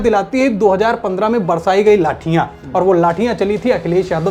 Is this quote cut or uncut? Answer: uncut